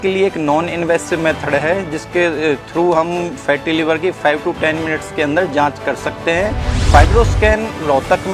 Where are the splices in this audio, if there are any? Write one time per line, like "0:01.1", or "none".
0:06.7